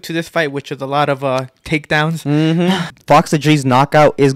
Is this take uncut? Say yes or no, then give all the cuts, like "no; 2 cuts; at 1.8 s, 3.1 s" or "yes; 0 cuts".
no; 1 cut; at 2.9 s